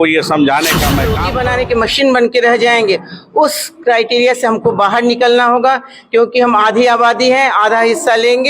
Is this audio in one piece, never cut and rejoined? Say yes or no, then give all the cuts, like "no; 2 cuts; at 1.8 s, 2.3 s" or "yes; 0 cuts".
no; 1 cut; at 1.2 s